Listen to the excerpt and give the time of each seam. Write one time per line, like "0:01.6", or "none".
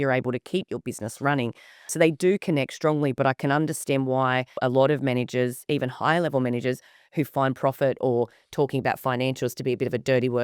0:01.9
0:04.6